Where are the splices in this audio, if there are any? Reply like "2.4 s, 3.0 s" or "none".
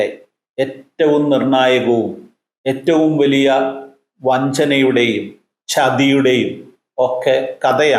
none